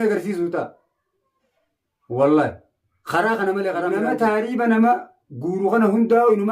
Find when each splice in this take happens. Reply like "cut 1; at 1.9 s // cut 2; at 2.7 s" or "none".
cut 1; at 4.0 s